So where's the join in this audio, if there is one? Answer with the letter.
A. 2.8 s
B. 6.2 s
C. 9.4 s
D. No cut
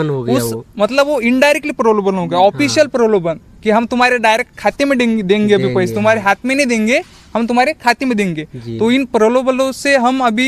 D